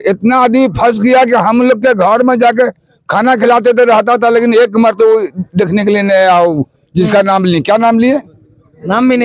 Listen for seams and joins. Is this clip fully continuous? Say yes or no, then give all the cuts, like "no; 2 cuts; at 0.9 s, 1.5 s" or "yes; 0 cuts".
yes; 0 cuts